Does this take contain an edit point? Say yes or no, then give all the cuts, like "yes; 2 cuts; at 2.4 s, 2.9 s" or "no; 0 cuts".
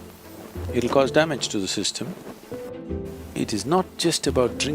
yes; 1 cut; at 2.7 s